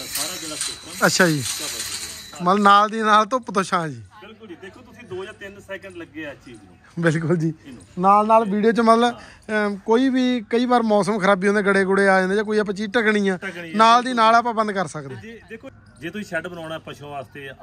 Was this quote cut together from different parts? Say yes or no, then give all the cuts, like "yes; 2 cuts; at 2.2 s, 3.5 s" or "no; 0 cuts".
no; 0 cuts